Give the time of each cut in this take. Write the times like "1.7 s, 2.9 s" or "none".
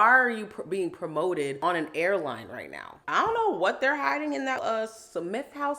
3.0 s, 4.6 s